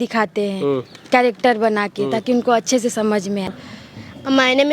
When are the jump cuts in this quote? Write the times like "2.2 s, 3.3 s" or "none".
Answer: 3.5 s